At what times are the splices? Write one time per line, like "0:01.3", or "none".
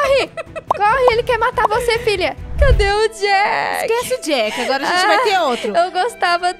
0:02.5